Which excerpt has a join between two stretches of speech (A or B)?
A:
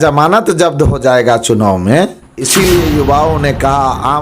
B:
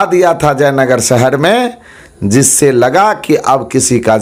A